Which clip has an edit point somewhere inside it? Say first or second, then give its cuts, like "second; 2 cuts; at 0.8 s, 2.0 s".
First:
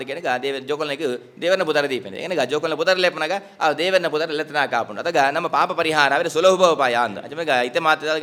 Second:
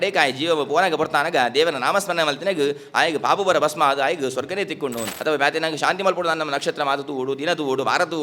second; 1 cut; at 5.1 s